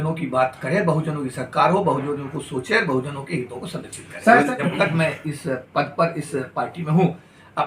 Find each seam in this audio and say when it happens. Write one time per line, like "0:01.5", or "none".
0:04.6